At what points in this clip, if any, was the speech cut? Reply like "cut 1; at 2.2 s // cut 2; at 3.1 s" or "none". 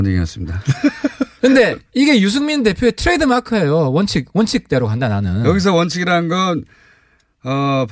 none